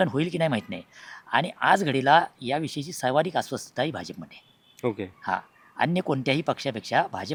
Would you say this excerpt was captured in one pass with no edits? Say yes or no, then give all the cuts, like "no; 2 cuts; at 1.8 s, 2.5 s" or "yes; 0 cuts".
yes; 0 cuts